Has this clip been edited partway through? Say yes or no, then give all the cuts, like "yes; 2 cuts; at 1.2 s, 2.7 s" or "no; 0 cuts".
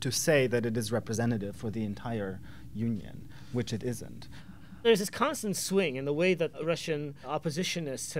yes; 1 cut; at 4.6 s